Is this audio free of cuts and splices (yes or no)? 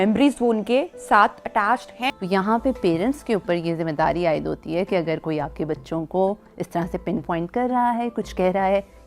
no